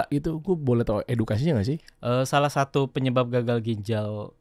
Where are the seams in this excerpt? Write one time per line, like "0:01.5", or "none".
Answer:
none